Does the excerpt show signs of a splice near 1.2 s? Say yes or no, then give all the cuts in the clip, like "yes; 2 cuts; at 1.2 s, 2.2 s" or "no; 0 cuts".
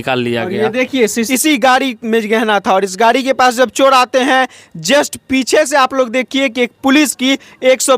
yes; 1 cut; at 1.2 s